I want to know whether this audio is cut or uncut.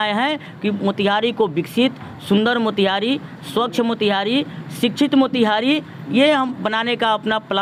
uncut